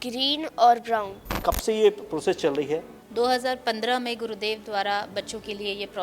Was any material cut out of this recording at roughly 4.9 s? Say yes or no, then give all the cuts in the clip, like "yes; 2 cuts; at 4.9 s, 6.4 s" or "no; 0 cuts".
no; 2 cuts; at 1.4 s, 2.9 s